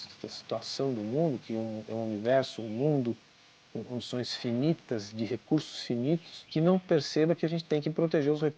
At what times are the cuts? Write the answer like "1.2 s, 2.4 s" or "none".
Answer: 6.9 s

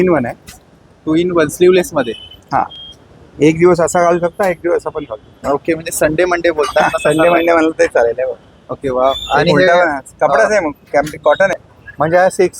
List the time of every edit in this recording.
11.7 s

